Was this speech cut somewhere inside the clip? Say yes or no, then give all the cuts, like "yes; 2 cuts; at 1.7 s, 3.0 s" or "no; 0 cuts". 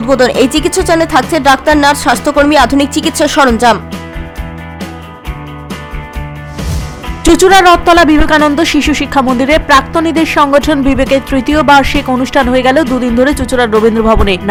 no; 0 cuts